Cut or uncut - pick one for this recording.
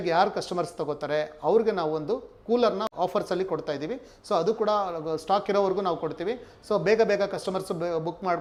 uncut